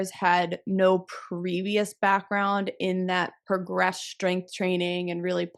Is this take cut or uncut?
uncut